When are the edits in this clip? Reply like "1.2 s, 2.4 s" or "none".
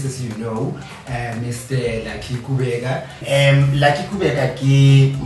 3.2 s